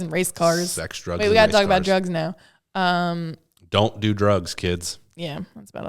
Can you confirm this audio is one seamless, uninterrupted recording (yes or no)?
yes